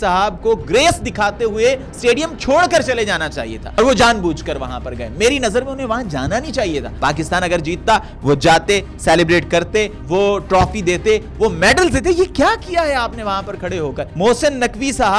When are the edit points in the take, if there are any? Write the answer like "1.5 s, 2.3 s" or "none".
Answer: 3.7 s, 6.9 s, 10.0 s, 14.0 s

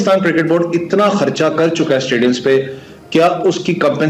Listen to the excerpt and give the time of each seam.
none

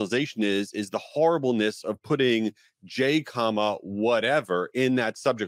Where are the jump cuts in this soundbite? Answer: none

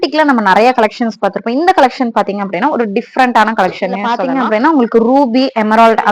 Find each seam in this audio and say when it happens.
4.2 s

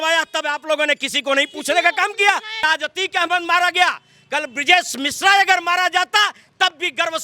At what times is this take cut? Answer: 2.6 s

